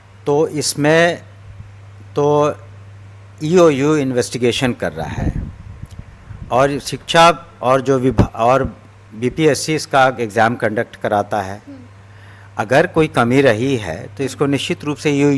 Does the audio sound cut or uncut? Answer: uncut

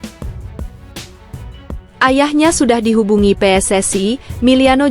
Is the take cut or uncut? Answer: cut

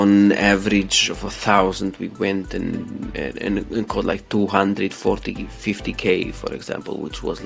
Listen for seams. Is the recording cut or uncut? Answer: uncut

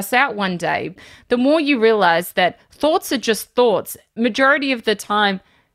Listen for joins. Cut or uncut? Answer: cut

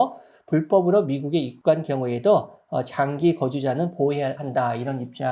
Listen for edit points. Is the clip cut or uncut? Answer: cut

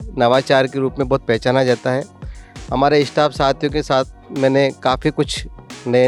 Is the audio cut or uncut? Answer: uncut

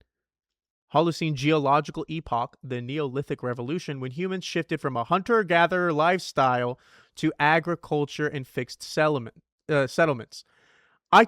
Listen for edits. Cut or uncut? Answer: uncut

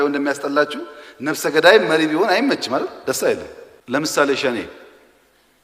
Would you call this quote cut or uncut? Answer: cut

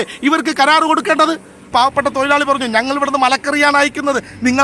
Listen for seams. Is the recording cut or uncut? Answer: cut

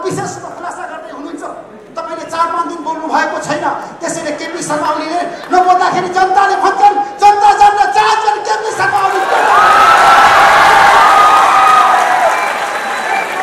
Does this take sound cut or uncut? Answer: uncut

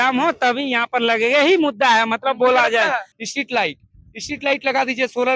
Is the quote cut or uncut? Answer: cut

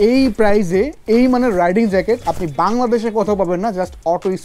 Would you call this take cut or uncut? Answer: uncut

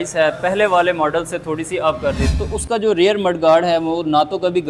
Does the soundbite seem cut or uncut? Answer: cut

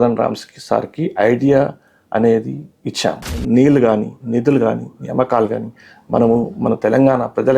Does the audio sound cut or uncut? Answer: cut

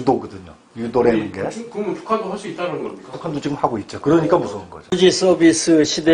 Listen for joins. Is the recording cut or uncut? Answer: cut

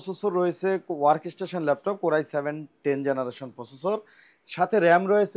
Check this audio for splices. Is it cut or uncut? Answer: uncut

